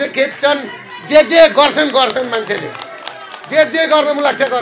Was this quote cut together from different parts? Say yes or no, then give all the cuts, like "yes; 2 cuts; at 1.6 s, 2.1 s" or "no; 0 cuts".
no; 0 cuts